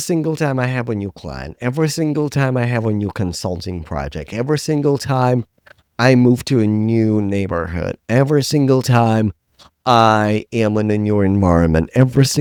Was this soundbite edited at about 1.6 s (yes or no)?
no